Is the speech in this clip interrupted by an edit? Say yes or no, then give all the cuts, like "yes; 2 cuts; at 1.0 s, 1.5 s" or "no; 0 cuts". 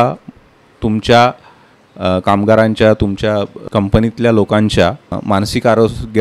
yes; 2 cuts; at 3.6 s, 5.1 s